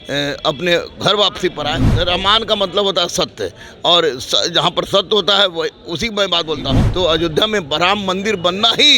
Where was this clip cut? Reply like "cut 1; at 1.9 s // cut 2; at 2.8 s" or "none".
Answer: cut 1; at 1.9 s // cut 2; at 6.8 s

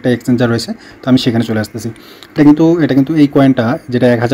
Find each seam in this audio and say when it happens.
cut 1; at 2.2 s

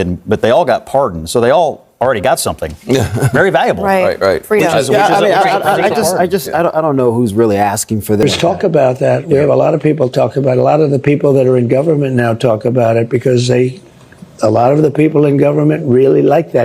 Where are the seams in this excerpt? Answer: cut 1; at 8.2 s

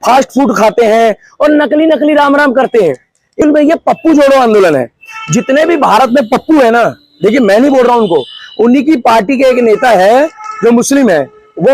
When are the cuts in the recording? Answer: cut 1; at 3.4 s

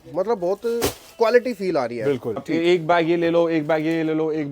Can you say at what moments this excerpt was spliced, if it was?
cut 1; at 2.4 s

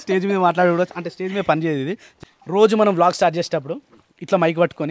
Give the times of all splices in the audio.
cut 1; at 2.1 s

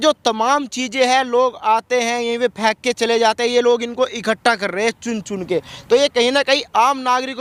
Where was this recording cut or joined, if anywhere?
none

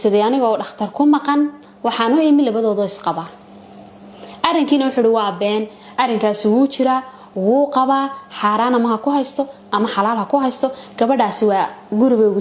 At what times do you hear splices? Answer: none

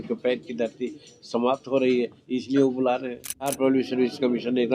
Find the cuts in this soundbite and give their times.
cut 1; at 3.6 s

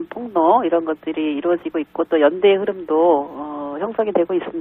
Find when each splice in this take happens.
none

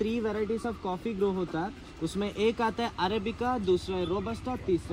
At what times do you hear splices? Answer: none

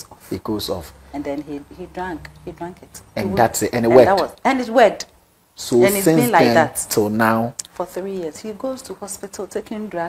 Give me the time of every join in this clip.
cut 1; at 8.5 s

